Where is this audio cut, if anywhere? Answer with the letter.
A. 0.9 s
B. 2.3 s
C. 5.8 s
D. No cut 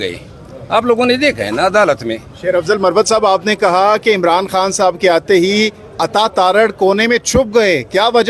B